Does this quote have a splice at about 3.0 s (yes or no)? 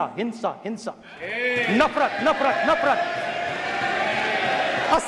no